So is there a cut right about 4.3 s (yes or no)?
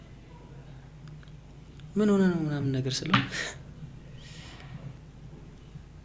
no